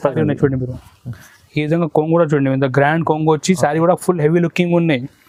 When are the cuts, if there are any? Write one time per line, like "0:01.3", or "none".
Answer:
none